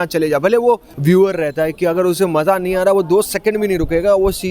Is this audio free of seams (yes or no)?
no